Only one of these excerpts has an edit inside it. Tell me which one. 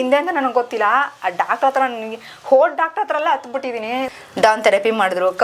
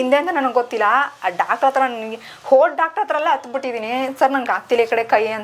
first; 1 cut; at 4.1 s

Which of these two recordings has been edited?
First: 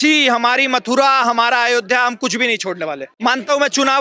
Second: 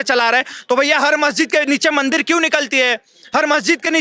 first; 1 cut; at 3.1 s

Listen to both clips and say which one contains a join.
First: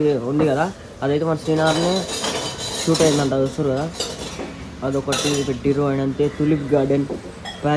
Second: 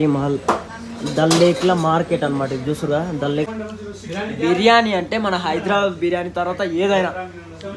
second; 1 cut; at 3.5 s

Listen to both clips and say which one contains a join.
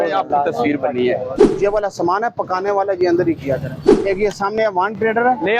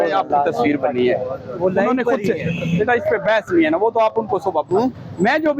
first; 2 cuts; at 1.4 s, 3.8 s

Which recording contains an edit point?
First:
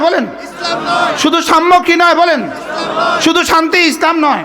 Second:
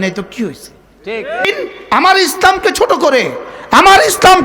second; 1 cut; at 1.5 s

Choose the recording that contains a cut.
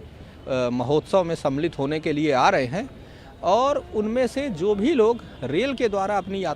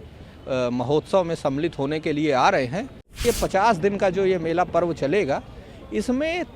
second; 1 cut; at 3.2 s

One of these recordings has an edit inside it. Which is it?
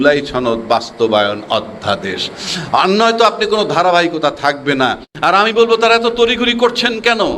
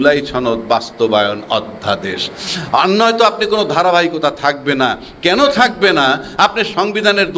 first; 1 cut; at 5.1 s

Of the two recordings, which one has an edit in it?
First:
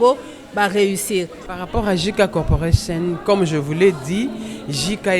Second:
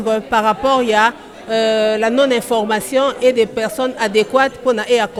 first; 1 cut; at 1.4 s

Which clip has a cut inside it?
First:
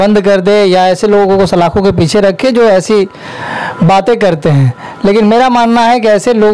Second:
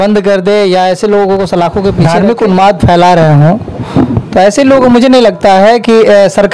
second; 1 cut; at 2.0 s

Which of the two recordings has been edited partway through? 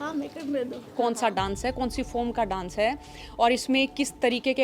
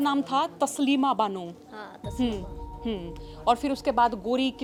first; 1 cut; at 0.9 s

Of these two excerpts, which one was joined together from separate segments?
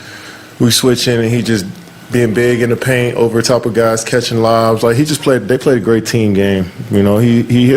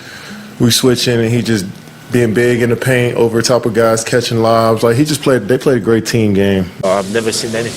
second; 1 cut; at 6.8 s

